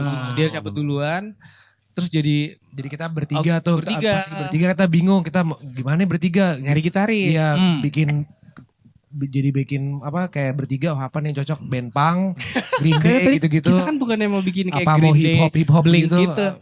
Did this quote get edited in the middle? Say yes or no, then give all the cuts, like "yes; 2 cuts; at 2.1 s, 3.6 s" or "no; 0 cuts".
no; 0 cuts